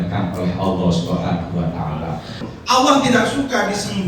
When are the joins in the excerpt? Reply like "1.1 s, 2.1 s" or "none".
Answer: 2.4 s